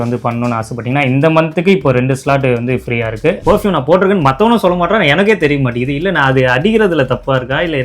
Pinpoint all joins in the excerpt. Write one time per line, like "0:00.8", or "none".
0:03.4